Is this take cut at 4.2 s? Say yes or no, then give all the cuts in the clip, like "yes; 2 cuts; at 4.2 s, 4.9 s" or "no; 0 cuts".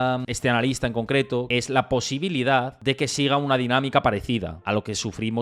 no; 1 cut; at 1.5 s